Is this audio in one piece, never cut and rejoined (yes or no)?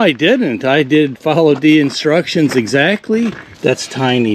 no